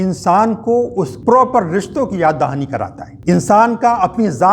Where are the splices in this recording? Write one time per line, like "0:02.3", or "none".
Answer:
0:01.1
0:03.0